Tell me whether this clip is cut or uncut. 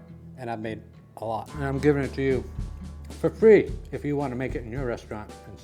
cut